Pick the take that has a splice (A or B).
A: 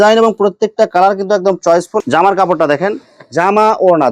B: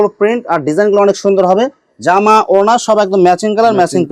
A